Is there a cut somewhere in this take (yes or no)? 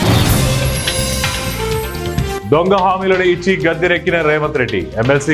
no